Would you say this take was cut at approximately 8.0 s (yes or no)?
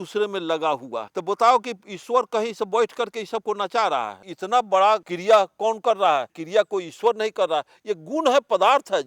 no